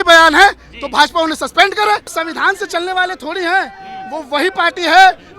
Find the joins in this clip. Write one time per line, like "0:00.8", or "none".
0:02.2